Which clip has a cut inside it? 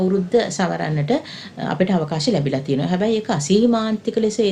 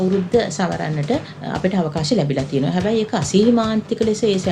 second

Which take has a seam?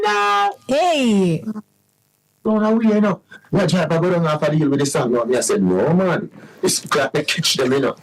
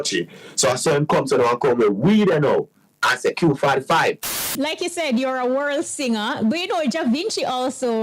second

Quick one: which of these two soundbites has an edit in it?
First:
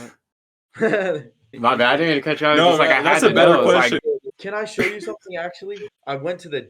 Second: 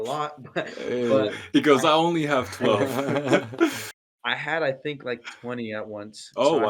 first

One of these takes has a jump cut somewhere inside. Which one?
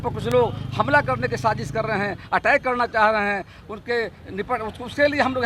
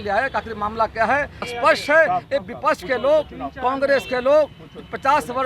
second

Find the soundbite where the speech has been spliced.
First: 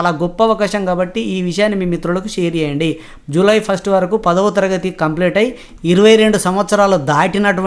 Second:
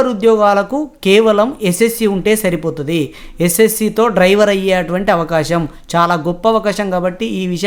first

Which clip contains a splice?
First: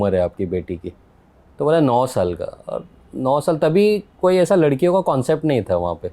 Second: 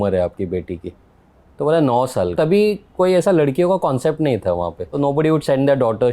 second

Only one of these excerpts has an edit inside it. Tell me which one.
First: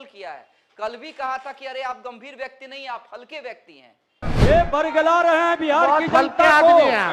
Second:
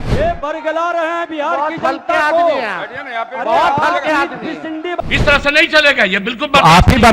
second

